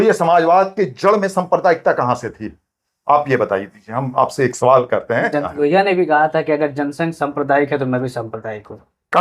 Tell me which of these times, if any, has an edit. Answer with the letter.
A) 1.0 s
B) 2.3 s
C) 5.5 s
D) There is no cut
C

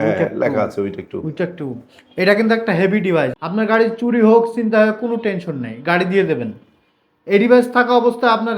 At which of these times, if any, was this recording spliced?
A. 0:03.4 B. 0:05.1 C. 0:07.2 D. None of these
A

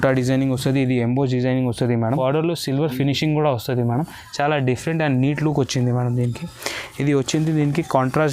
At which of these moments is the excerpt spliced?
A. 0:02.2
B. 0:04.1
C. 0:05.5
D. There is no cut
A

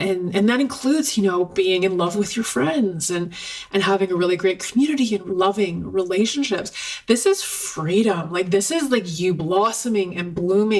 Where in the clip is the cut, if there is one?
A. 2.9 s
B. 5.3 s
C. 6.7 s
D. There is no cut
B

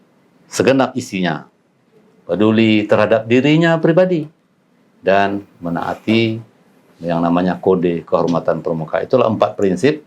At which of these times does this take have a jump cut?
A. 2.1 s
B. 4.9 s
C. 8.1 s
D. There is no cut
D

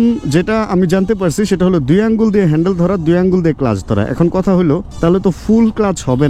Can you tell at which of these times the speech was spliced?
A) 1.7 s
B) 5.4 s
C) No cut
C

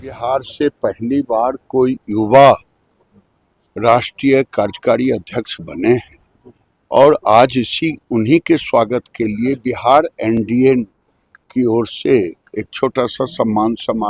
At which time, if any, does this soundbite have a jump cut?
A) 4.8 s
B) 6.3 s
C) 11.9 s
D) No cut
D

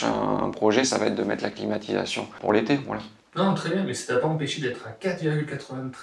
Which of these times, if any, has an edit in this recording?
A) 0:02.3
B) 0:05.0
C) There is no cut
A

